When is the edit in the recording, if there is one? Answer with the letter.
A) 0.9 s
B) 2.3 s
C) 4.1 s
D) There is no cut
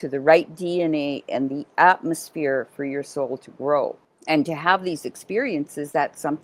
C